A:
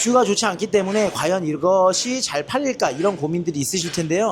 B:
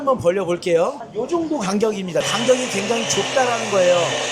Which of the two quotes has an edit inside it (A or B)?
B